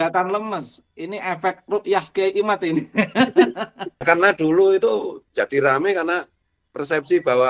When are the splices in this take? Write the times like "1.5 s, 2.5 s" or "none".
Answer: 4.1 s